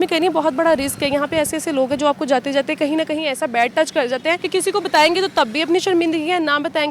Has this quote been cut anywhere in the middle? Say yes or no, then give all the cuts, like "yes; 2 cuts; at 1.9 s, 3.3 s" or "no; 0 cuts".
yes; 1 cut; at 4.4 s